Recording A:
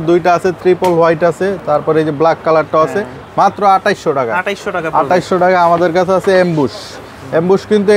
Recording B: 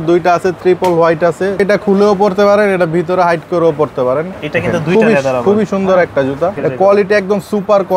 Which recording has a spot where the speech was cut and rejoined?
B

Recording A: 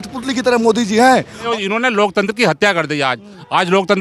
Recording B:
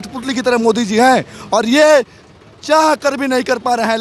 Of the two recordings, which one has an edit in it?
A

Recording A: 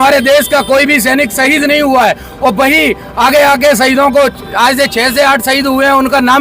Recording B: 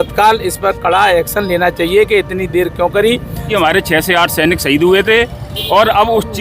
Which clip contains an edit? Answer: B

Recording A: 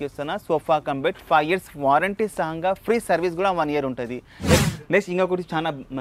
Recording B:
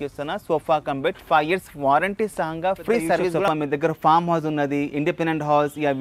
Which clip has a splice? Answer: B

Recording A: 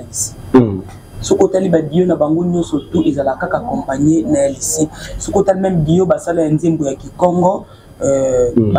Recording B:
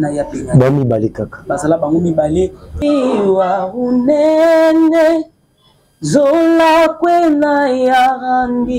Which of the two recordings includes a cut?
B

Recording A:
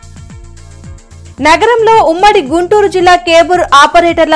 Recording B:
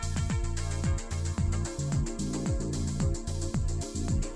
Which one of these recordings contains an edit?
A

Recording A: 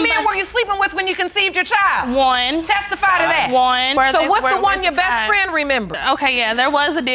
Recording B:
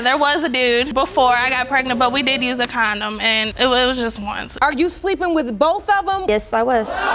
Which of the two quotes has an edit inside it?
B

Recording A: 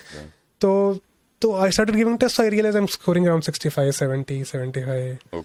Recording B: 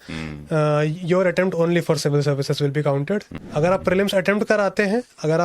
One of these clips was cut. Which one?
B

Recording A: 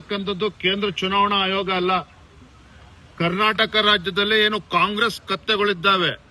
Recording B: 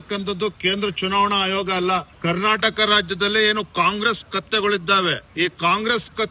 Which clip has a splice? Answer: B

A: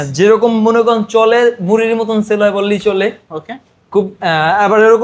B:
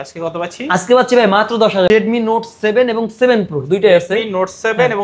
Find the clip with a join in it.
B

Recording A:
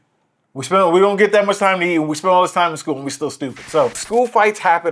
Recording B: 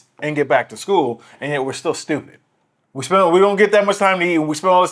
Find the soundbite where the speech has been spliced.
A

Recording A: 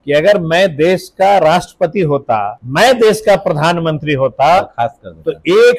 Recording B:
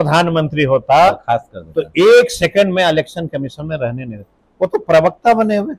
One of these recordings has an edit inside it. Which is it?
A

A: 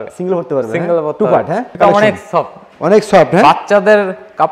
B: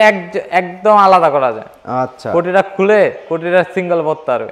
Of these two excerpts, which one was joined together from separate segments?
A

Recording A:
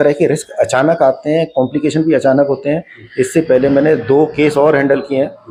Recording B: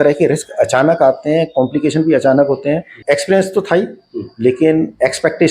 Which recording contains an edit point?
B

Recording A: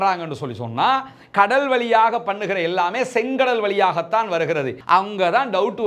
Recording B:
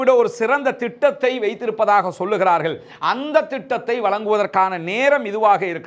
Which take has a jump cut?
A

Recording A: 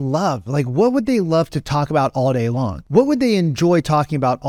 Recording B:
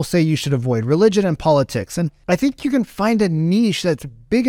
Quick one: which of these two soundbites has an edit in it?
B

